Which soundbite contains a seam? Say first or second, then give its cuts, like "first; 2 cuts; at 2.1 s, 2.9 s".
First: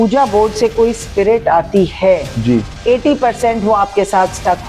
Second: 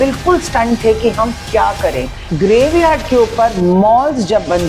second; 1 cut; at 2.2 s